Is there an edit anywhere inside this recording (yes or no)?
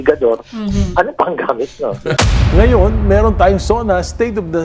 yes